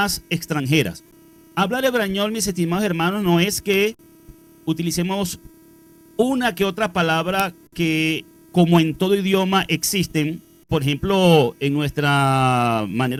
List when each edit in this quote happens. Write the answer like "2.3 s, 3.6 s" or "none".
none